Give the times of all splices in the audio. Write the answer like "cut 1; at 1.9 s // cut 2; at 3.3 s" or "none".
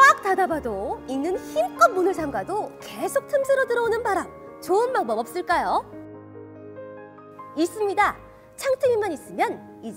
none